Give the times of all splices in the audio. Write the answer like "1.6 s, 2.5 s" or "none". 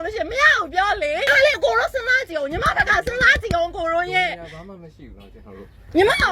1.3 s